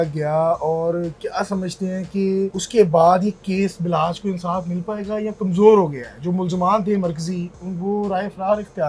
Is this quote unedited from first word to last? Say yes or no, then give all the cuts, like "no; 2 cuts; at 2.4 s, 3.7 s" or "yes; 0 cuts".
no; 1 cut; at 2.6 s